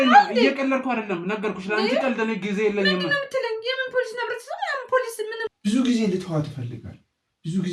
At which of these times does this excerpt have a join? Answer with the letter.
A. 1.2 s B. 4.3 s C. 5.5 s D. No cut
C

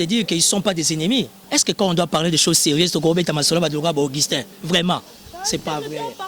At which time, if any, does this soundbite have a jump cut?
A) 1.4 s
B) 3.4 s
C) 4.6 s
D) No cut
A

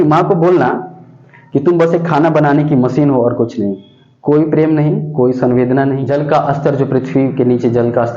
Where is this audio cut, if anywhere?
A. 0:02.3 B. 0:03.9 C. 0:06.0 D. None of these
C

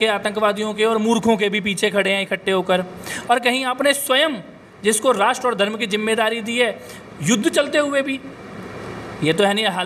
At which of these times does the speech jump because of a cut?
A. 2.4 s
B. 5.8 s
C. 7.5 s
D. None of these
D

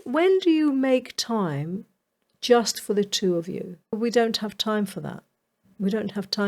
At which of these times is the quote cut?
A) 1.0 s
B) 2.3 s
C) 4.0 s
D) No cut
C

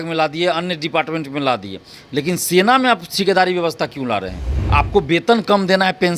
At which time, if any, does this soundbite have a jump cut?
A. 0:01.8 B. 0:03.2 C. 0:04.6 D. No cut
C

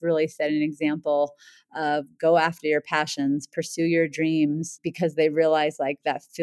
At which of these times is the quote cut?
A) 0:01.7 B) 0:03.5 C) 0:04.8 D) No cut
C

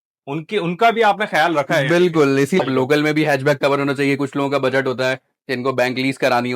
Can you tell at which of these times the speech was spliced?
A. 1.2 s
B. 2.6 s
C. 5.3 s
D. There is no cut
B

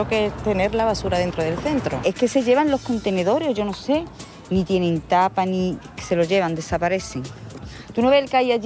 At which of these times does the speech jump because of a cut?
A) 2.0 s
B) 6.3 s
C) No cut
A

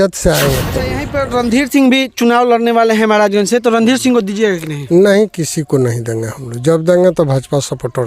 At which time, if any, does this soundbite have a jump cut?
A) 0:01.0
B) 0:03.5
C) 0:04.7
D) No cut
A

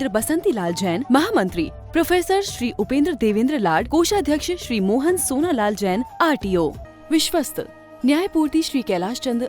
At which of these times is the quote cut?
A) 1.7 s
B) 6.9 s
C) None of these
B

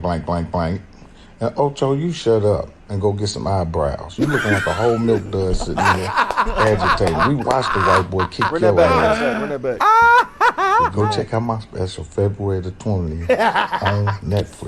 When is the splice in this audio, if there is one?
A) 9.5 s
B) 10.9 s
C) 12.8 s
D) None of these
B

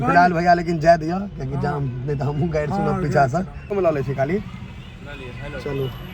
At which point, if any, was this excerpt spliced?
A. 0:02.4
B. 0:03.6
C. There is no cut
B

